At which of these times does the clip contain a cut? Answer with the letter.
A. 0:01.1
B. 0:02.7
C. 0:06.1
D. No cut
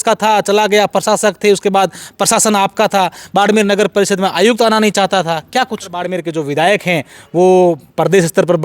C